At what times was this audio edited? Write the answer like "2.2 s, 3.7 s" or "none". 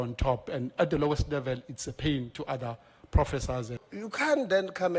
3.8 s

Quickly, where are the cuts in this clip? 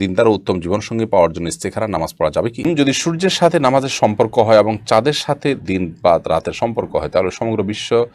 2.6 s

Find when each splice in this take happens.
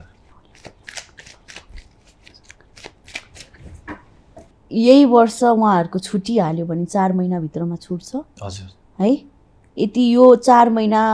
4.6 s

